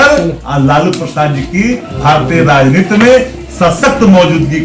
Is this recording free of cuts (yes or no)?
yes